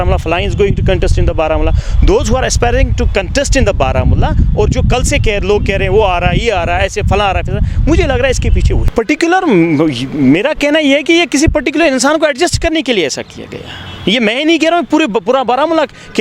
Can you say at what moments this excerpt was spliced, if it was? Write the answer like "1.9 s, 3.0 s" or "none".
8.8 s